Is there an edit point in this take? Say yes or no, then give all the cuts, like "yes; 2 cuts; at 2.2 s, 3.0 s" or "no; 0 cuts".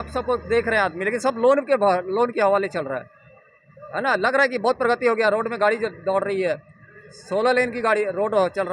no; 0 cuts